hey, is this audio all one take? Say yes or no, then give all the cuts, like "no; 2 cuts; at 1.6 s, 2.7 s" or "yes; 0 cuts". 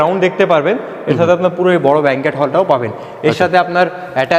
yes; 0 cuts